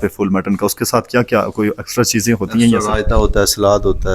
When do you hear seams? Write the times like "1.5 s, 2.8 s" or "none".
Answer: none